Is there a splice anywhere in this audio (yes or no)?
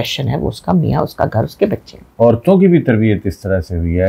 yes